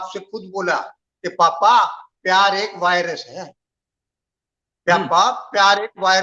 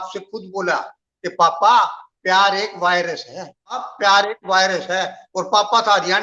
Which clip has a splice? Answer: second; 1 cut; at 3.9 s

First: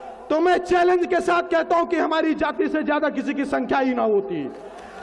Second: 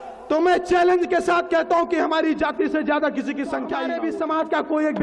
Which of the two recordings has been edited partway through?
second; 1 cut; at 3.8 s

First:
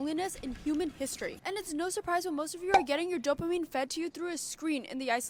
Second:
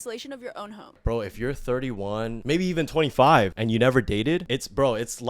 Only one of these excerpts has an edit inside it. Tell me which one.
second; 4 cuts; at 1.0 s, 2.4 s, 3.6 s, 4.4 s

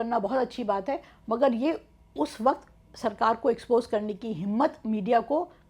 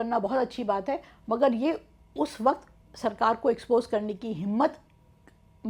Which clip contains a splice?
first; 1 cut; at 4.8 s

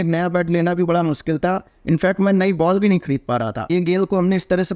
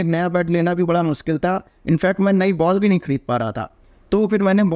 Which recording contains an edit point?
first; 1 cut; at 3.7 s

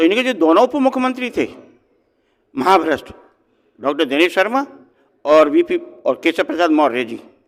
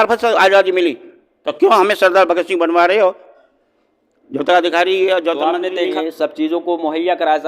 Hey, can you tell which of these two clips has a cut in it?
second; 1 cut; at 5.9 s

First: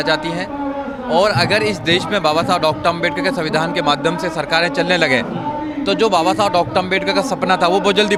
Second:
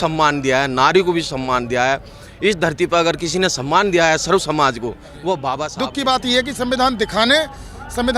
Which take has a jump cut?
second; 1 cut; at 5.7 s

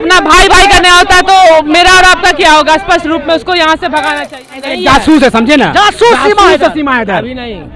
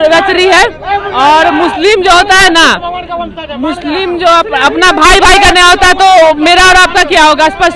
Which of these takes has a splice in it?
first; 1 cut; at 4.7 s

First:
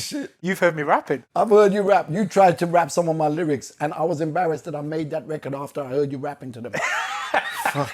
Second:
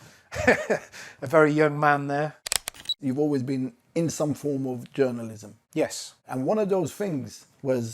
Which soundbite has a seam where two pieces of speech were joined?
second; 1 cut; at 2.9 s

